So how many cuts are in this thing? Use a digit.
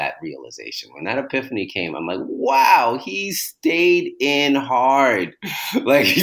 0